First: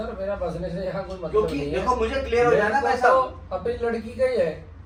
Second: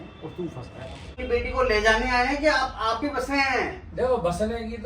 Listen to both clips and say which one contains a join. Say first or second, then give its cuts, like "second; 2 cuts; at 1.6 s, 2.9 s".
second; 1 cut; at 1.2 s